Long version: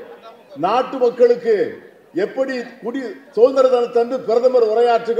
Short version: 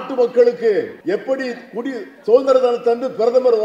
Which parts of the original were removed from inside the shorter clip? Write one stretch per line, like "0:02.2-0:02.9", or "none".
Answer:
0:01.8-0:02.0